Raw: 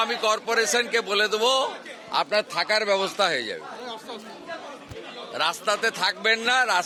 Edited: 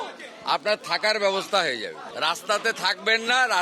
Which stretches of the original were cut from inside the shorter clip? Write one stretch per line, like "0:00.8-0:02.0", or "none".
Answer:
0:03.7-0:05.2

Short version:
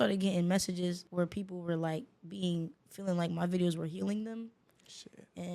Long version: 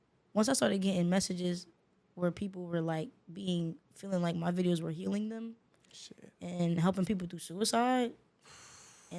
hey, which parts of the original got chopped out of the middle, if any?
0:01.7-0:02.1

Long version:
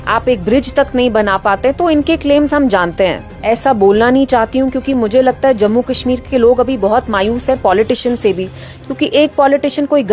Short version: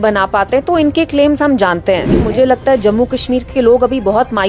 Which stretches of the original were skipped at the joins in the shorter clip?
0:03.3-0:05.0

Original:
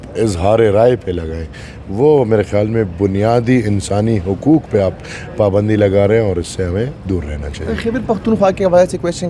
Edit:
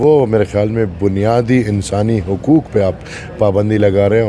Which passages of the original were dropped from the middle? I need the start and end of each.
none

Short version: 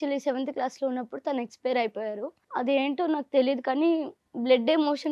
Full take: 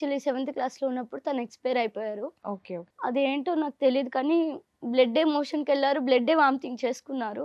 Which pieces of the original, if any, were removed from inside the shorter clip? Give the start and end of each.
0:02.4-0:02.8

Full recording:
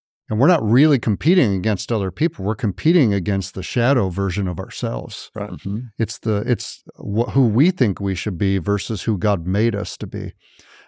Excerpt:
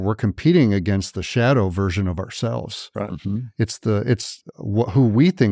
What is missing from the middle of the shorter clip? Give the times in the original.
none

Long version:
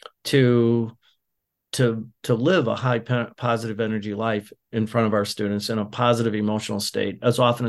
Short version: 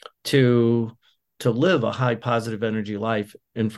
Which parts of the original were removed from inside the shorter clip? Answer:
0:01.3-0:02.1
0:03.0-0:03.4

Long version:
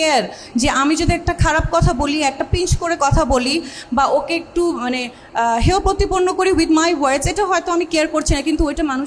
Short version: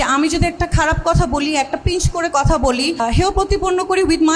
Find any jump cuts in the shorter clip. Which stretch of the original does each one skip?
0:03.7-0:05.5

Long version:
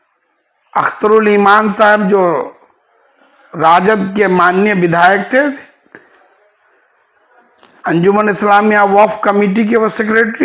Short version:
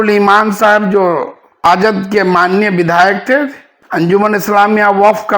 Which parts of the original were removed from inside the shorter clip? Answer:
0:02.8-0:03.7
0:06.1-0:08.0

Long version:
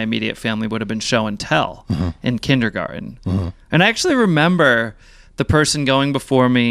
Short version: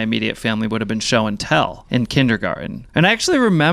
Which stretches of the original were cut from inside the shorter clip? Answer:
0:01.8-0:02.1
0:03.1-0:03.6

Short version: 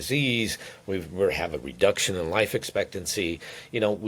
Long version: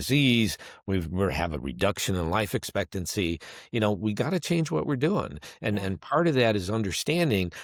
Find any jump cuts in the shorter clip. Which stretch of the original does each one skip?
none

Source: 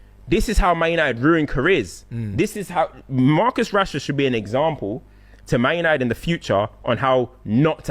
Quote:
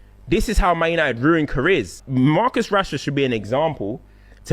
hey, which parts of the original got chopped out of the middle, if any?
0:02.0-0:03.0

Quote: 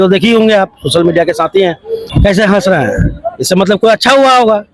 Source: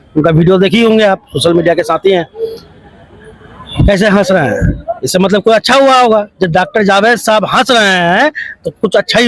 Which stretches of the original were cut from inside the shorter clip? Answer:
0:02.5-0:03.6

